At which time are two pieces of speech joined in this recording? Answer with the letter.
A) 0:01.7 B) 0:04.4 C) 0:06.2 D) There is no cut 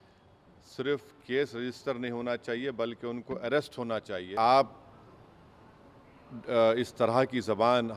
B